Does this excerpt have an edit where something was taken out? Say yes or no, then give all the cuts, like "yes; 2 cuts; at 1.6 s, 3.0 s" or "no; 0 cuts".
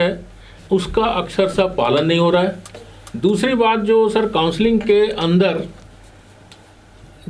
no; 0 cuts